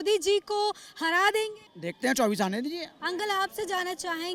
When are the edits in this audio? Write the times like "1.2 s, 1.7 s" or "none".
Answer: none